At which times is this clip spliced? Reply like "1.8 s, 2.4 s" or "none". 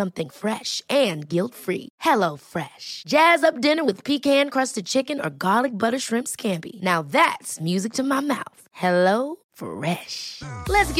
none